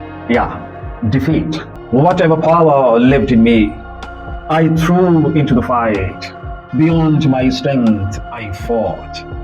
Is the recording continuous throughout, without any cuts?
no; 1 cut; at 1.7 s

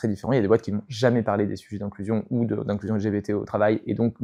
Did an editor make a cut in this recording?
no; 0 cuts

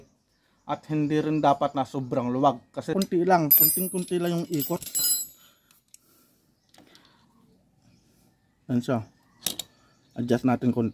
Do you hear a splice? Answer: yes; 1 cut; at 2.9 s

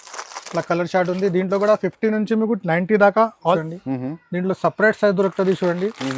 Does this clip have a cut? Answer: yes; 1 cut; at 3.6 s

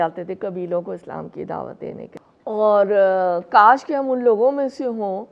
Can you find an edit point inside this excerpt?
yes; 1 cut; at 2.2 s

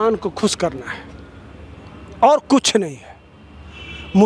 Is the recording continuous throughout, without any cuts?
yes; 0 cuts

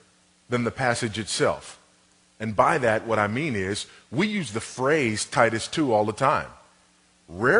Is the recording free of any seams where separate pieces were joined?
yes; 0 cuts

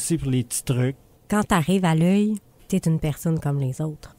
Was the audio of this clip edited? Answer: yes; 1 cut; at 1.1 s

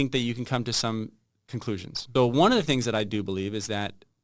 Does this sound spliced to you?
yes; 1 cut; at 2.0 s

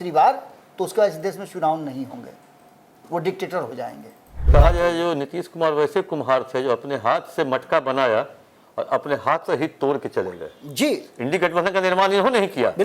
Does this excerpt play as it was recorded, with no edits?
no; 1 cut; at 4.5 s

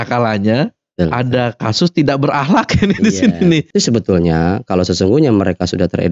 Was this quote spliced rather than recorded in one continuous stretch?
yes; 1 cut; at 3.7 s

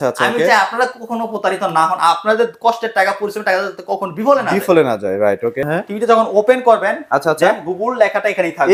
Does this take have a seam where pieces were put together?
no; 0 cuts

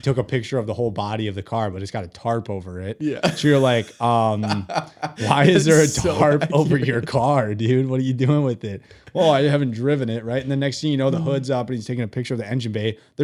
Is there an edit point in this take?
no; 0 cuts

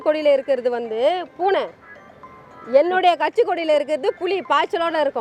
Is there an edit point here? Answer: no; 0 cuts

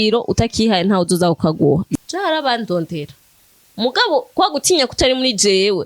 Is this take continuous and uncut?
no; 1 cut; at 1.9 s

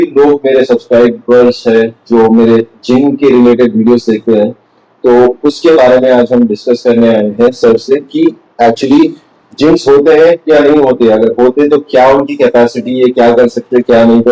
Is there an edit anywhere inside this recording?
no; 0 cuts

